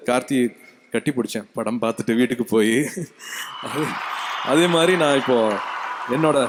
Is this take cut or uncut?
uncut